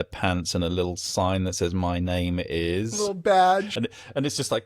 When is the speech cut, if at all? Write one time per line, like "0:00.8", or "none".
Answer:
none